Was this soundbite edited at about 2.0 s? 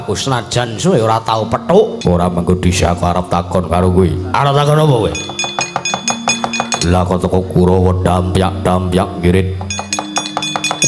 yes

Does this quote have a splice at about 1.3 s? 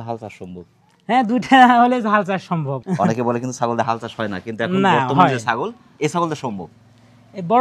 no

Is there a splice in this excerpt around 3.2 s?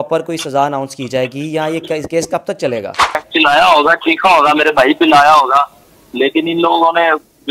yes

